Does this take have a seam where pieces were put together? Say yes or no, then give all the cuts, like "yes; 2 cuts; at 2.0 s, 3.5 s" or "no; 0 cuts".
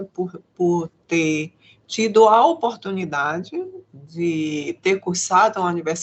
no; 0 cuts